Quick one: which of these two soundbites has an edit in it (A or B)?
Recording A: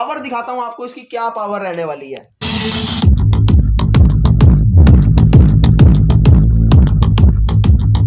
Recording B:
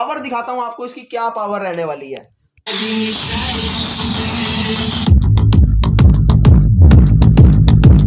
A